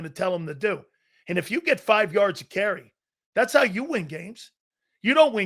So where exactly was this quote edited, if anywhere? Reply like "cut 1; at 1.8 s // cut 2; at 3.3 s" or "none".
none